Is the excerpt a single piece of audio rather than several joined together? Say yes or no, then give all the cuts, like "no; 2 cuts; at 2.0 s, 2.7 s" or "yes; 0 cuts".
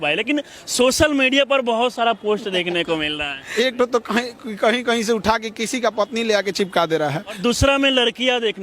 no; 2 cuts; at 3.4 s, 7.4 s